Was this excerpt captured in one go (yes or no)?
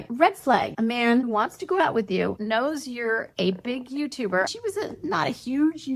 yes